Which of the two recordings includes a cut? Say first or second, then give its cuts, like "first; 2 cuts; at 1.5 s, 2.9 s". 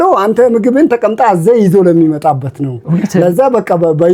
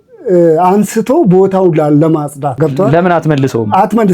second; 1 cut; at 2.5 s